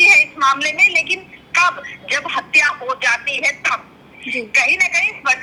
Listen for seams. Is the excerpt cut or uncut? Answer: uncut